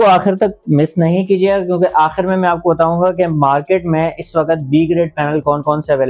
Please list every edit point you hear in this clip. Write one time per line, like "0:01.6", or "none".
none